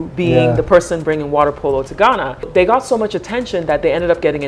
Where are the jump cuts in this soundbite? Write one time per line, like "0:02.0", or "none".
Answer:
0:02.5

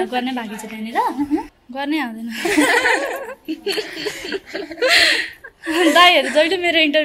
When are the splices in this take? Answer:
0:01.6

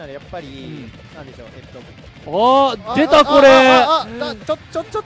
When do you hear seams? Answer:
none

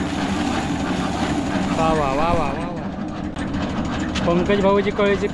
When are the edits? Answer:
0:03.3

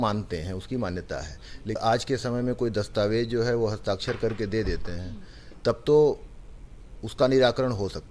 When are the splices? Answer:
0:01.8

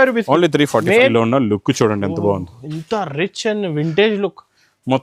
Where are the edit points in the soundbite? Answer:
0:01.1

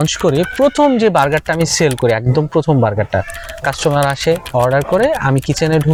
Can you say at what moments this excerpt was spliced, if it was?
none

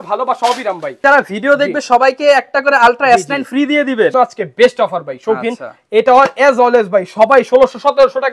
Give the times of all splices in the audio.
0:01.0
0:04.1

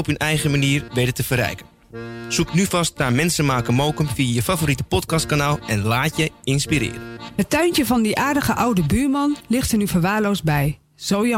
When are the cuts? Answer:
0:07.2

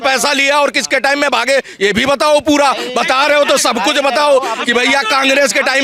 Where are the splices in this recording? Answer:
none

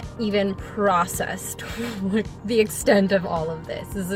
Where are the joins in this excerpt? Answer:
none

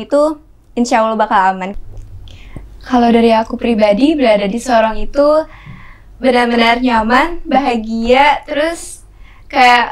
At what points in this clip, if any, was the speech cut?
0:01.7

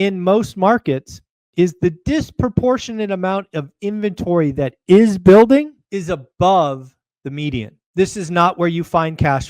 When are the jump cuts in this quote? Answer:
0:05.8
0:07.7

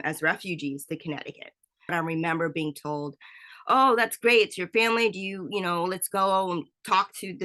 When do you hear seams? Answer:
0:01.9

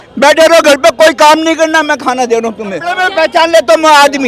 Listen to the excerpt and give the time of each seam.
0:02.9

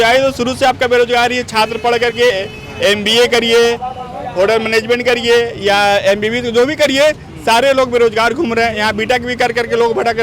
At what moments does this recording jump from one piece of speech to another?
none

